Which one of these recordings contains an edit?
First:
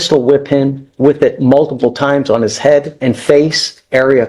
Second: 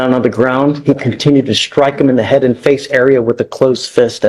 first; 1 cut; at 2.9 s

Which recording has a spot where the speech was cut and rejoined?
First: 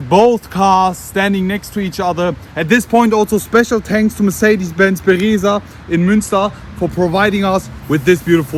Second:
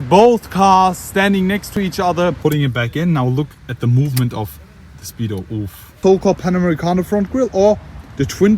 second; 2 cuts; at 2.1 s, 6.0 s

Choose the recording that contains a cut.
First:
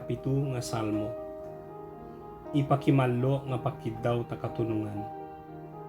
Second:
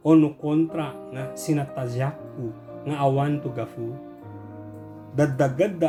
first; 2 cuts; at 1.0 s, 2.5 s

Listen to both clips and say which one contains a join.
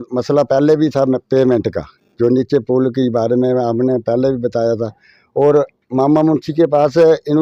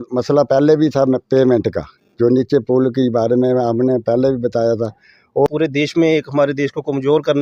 second; 1 cut; at 5.5 s

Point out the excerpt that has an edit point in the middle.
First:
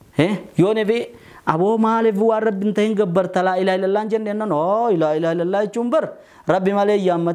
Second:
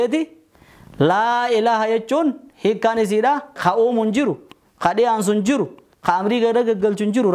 second; 1 cut; at 3.6 s

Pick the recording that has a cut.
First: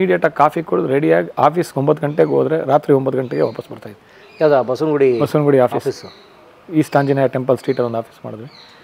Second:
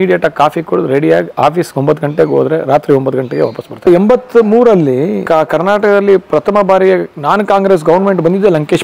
second; 2 cuts; at 3.9 s, 5.2 s

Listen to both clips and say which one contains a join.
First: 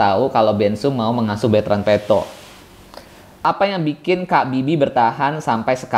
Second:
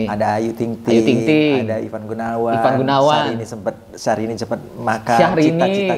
first; 1 cut; at 3.5 s

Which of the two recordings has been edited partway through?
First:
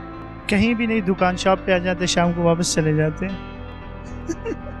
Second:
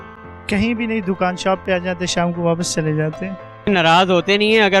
second; 1 cut; at 3.7 s

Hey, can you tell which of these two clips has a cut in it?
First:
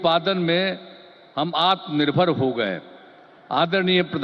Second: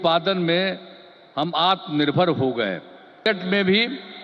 second; 1 cut; at 3.3 s

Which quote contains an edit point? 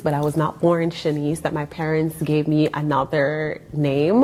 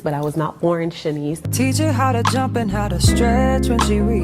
second; 1 cut; at 1.4 s

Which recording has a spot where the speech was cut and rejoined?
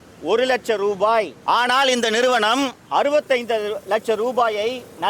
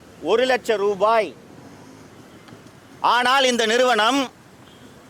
first; 2 cuts; at 1.3 s, 2.8 s

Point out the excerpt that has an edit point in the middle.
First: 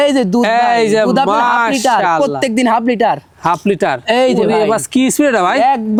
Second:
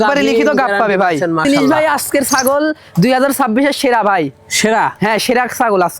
second; 1 cut; at 1.4 s

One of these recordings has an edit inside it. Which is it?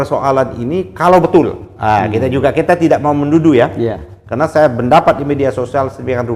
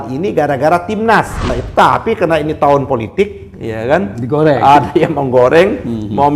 second; 1 cut; at 1.6 s

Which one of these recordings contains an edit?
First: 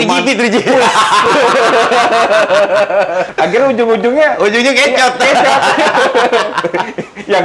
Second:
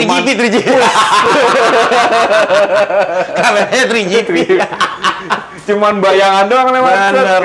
first; 1 cut; at 3.3 s

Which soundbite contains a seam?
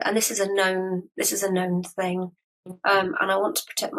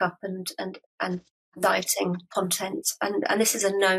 second; 1 cut; at 2.2 s

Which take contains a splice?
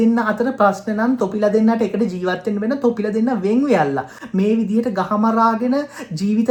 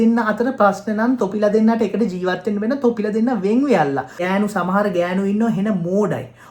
second; 1 cut; at 4.1 s

